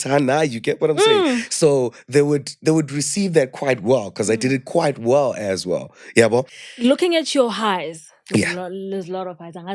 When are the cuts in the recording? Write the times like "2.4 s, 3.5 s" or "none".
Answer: 6.6 s